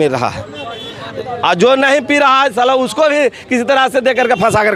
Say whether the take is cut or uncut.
uncut